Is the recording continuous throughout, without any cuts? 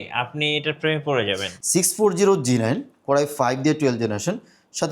no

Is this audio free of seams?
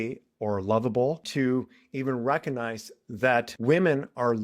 no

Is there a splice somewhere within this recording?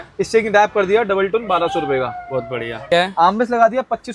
yes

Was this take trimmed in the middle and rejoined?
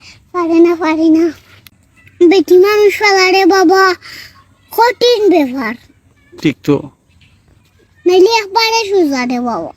yes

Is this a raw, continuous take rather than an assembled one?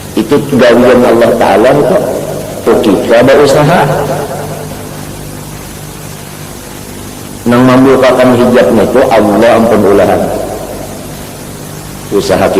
no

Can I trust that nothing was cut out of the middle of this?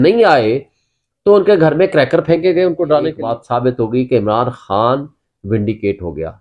no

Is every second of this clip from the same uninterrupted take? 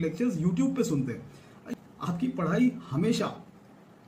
no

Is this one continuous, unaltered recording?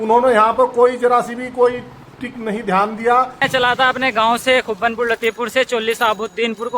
no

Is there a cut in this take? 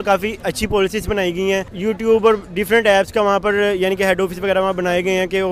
yes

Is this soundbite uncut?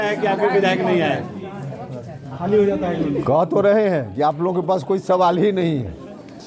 yes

